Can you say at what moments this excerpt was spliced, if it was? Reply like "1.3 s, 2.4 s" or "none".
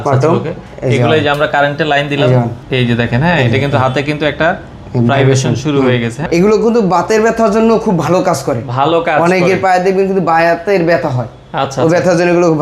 2.6 s, 6.1 s